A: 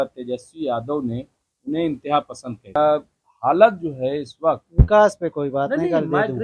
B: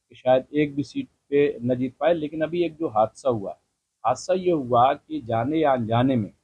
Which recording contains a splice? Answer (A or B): A